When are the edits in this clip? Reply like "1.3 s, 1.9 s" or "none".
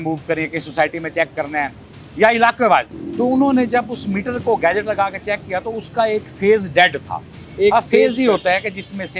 3.0 s

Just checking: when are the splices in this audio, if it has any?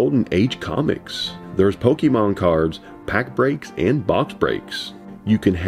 none

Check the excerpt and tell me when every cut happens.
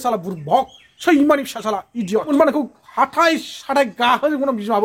2.3 s

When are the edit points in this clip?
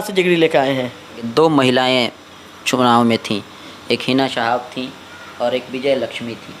1.3 s

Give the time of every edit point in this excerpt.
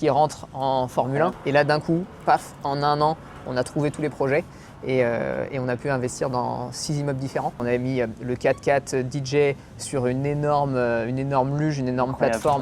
1.4 s, 7.6 s

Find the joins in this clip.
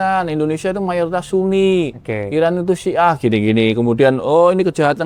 none

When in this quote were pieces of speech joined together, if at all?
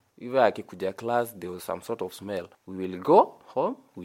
2.6 s

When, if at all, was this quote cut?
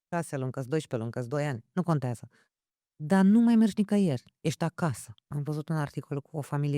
5.2 s

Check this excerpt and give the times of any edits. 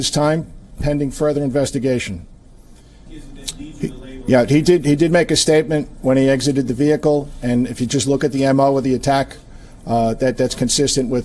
none

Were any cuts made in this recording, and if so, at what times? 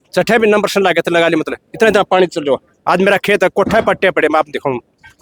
none

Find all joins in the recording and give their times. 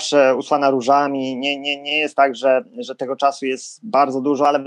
none

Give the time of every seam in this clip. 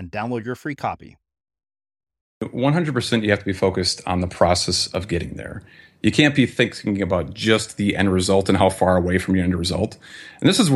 2.4 s

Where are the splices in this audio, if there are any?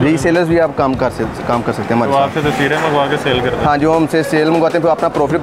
none

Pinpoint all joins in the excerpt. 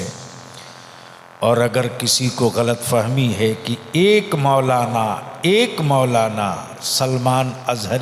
none

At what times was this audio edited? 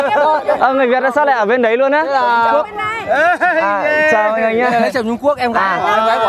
none

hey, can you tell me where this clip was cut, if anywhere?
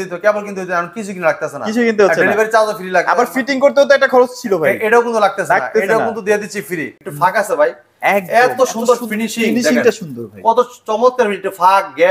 6.9 s

